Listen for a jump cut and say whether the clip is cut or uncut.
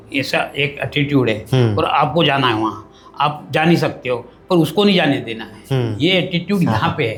uncut